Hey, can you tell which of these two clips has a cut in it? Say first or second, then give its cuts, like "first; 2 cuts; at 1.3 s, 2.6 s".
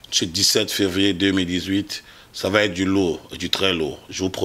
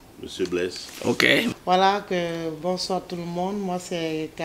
second; 1 cut; at 1.6 s